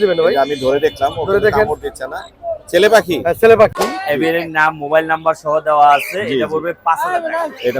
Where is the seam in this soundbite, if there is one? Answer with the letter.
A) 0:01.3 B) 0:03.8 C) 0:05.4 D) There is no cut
B